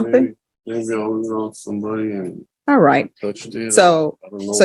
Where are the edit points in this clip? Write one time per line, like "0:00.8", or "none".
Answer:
0:02.4